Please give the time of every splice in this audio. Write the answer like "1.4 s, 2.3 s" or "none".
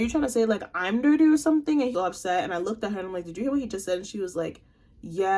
1.9 s